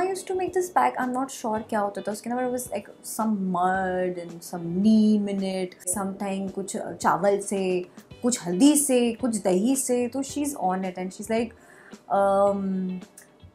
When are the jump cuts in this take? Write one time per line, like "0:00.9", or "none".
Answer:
0:06.0